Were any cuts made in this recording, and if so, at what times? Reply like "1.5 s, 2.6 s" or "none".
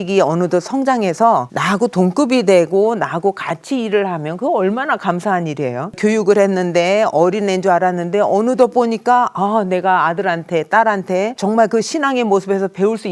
1.5 s, 6.0 s, 11.3 s